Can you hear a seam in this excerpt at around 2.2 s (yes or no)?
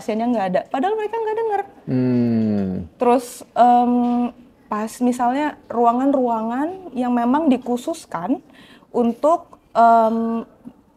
no